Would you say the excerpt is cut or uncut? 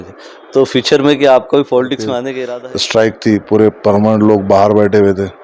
cut